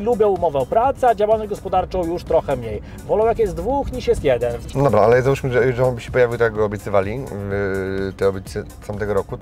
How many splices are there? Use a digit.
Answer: 1